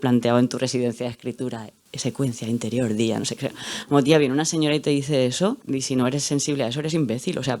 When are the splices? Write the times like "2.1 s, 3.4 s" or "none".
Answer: 5.6 s